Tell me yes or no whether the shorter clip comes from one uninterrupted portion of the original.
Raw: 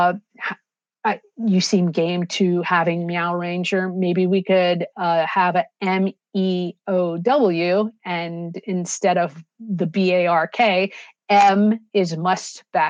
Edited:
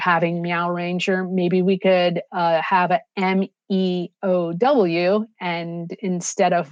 yes